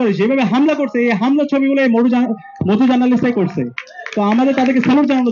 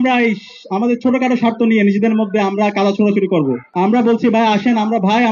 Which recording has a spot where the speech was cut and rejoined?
second; 1 cut; at 3.6 s

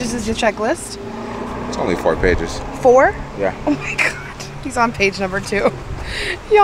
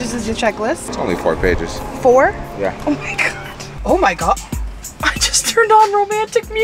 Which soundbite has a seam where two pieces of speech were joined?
second; 2 cuts; at 0.9 s, 3.6 s

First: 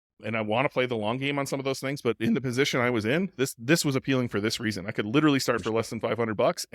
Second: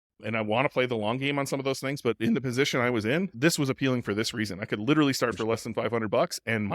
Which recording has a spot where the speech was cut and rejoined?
second; 1 cut; at 3.3 s

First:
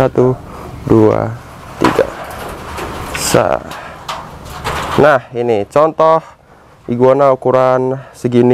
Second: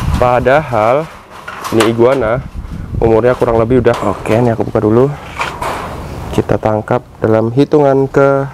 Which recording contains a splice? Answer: second; 1 cut; at 4.0 s

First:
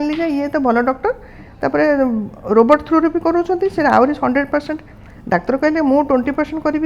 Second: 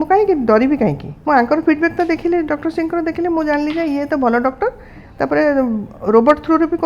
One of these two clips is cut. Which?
second; 1 cut; at 1.1 s

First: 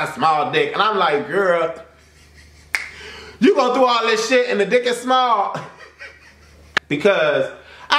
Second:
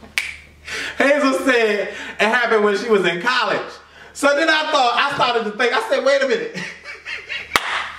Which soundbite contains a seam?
first; 1 cut; at 6.7 s

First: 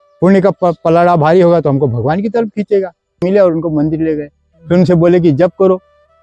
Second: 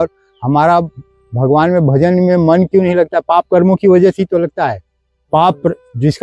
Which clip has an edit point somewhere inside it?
first; 1 cut; at 3.2 s

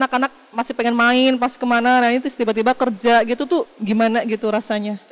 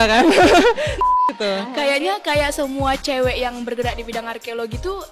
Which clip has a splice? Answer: second; 1 cut; at 1.2 s

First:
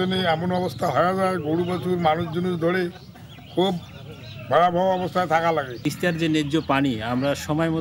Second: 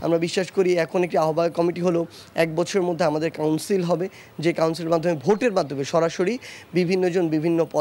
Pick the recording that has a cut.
first; 1 cut; at 5.8 s

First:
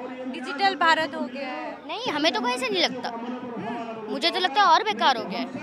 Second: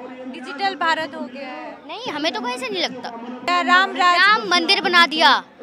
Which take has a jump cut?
second; 1 cut; at 3.4 s

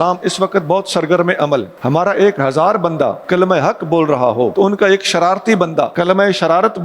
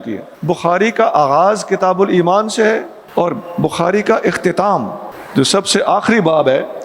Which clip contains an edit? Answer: first; 4 cuts; at 1.7 s, 3.2 s, 4.5 s, 5.9 s

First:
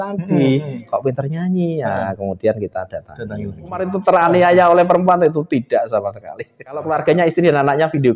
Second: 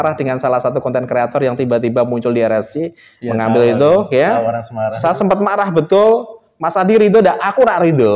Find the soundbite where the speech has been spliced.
first; 2 cuts; at 3.9 s, 6.9 s

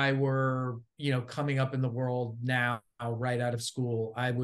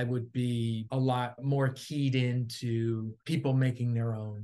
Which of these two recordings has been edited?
second; 2 cuts; at 1.1 s, 3.1 s

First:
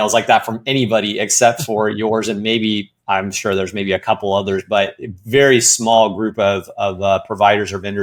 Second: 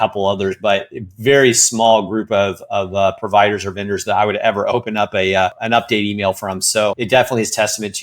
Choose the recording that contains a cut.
second; 2 cuts; at 5.6 s, 7.0 s

